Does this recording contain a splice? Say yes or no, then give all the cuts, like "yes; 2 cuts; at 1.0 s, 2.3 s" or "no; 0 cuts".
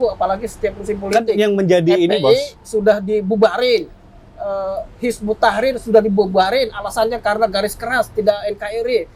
no; 0 cuts